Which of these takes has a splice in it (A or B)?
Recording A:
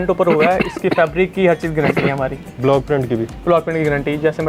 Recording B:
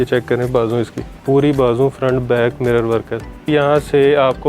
B